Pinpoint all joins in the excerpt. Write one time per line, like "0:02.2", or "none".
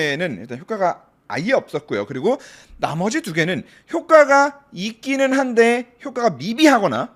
none